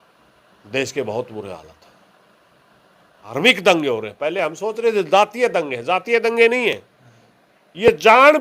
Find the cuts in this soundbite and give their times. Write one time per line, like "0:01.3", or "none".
0:03.3